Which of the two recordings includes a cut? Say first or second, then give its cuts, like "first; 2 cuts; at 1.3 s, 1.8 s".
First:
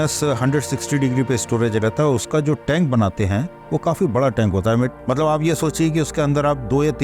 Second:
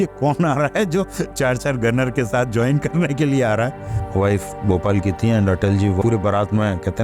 second; 2 cuts; at 4.0 s, 6.0 s